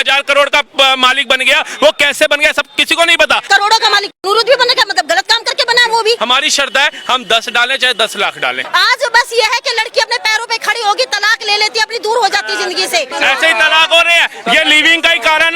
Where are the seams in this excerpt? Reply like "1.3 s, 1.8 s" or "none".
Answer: 3.4 s, 6.2 s, 8.6 s, 13.1 s